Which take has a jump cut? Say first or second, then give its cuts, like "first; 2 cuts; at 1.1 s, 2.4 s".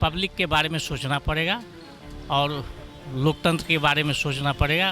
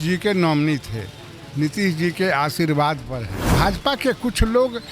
second; 1 cut; at 3.4 s